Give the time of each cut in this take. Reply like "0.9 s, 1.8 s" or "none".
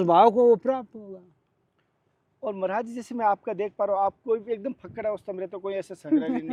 none